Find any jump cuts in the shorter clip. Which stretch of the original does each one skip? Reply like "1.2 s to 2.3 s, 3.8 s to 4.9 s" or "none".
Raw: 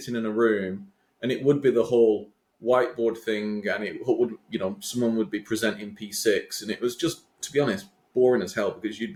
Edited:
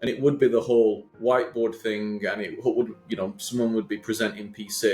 2.3 s to 2.5 s